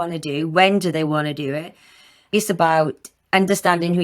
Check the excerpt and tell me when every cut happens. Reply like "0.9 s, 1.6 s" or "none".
2.3 s